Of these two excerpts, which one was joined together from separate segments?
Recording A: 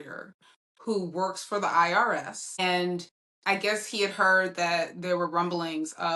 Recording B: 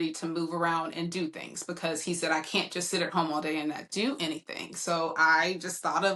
A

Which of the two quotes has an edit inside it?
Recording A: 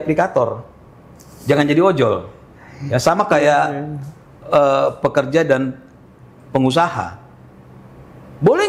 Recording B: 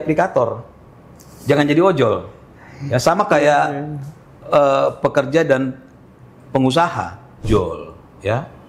B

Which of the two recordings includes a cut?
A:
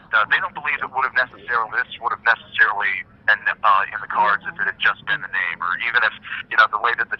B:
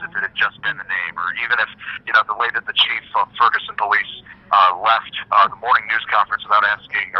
B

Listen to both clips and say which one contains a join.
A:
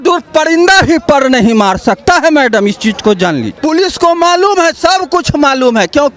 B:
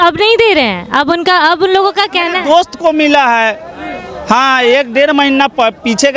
A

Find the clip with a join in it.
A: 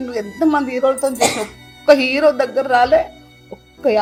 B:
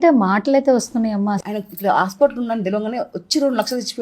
B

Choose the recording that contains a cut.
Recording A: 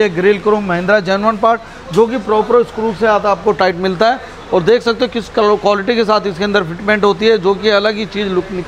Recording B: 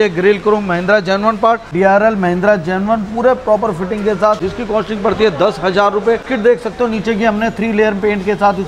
B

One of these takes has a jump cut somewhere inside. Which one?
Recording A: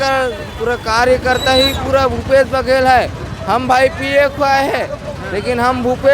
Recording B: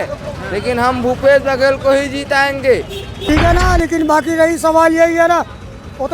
B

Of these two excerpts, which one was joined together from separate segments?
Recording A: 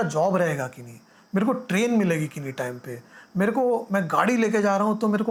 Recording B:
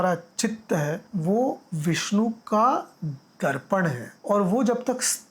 B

